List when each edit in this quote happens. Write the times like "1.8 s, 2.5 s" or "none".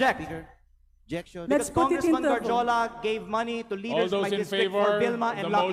none